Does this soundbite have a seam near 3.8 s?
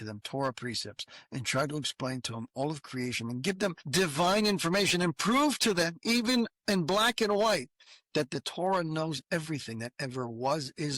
yes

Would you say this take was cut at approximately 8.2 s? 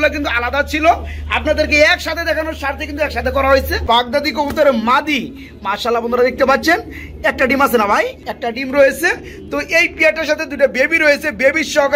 yes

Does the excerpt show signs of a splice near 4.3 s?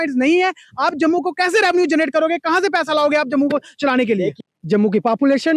yes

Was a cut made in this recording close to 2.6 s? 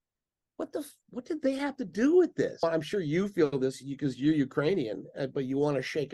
yes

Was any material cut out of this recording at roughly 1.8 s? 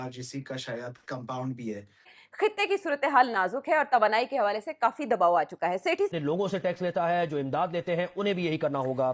no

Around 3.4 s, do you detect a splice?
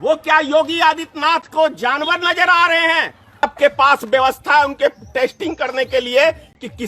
yes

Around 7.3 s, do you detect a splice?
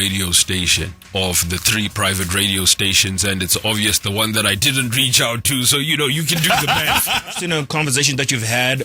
yes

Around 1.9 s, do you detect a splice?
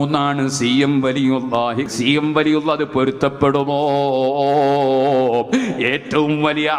yes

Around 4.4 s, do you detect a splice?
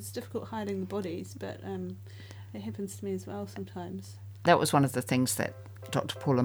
yes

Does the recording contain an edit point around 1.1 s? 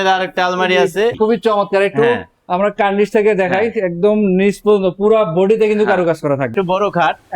yes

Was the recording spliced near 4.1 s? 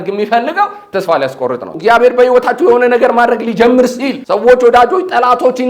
yes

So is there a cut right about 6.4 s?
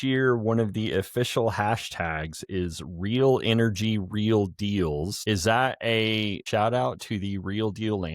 yes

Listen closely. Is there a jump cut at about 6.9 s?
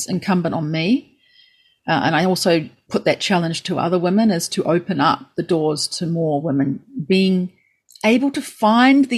no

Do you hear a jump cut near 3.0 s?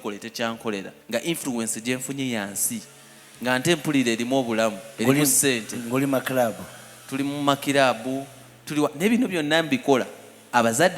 no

